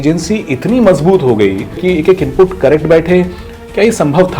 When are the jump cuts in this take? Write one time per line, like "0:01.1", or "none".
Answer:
0:01.8
0:03.5